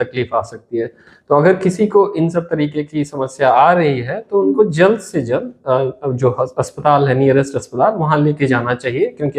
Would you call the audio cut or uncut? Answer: uncut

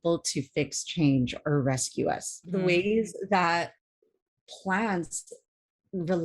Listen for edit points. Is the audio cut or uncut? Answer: cut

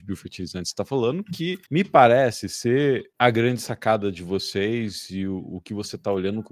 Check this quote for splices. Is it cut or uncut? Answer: cut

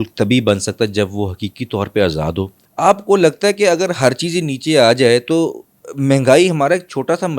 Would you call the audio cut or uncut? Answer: cut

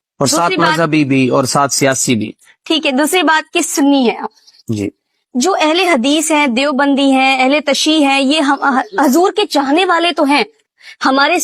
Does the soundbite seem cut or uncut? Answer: uncut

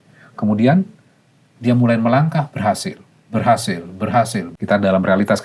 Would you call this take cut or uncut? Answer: cut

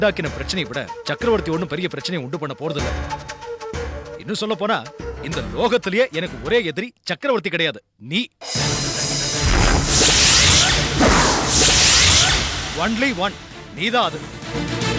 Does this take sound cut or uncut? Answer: uncut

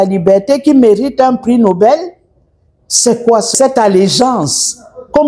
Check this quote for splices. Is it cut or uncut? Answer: cut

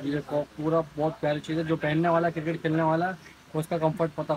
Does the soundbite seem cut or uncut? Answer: uncut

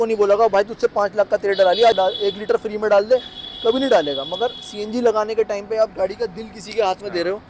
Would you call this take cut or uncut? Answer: uncut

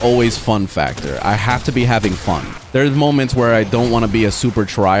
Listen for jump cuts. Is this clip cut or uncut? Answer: cut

